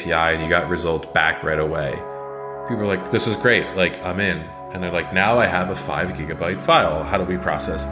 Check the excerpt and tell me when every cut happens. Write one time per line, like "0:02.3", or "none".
0:02.5